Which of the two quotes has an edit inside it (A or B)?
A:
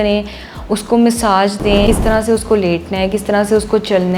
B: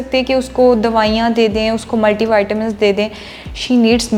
A